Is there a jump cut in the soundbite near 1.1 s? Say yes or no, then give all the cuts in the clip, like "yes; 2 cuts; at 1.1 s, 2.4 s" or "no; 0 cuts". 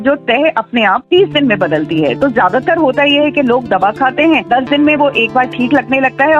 no; 0 cuts